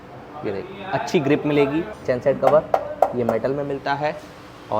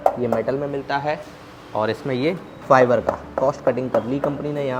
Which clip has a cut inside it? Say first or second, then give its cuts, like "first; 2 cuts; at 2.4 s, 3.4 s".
first; 1 cut; at 1.9 s